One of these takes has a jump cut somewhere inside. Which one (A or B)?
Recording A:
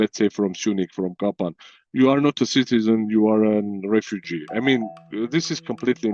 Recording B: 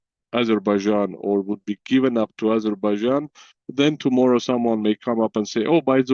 A